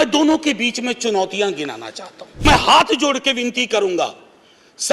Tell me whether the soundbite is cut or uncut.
cut